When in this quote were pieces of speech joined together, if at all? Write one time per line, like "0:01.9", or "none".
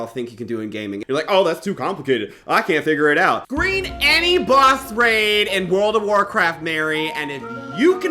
0:01.0
0:03.5